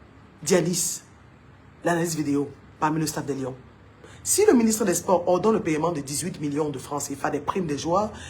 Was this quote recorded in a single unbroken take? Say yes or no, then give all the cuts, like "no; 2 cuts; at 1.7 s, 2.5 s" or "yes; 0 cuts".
no; 1 cut; at 4.1 s